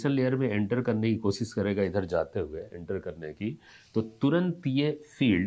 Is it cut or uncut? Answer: uncut